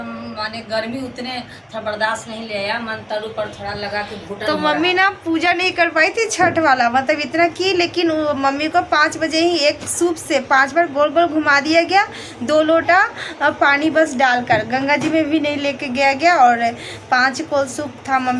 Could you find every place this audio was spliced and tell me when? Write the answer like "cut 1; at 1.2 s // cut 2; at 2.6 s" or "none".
none